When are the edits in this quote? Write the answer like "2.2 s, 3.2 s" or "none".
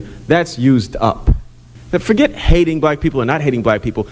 1.7 s